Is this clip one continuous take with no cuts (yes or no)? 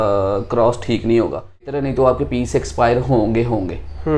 no